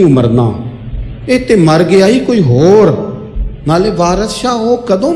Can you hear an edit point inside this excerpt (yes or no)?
no